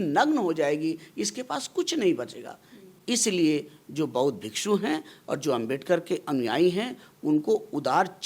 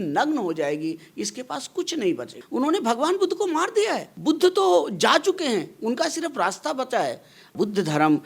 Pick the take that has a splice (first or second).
second